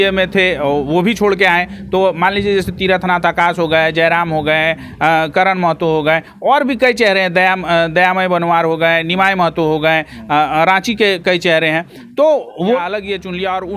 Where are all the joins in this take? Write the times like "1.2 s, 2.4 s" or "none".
12.8 s